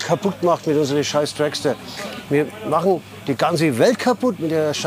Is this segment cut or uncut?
uncut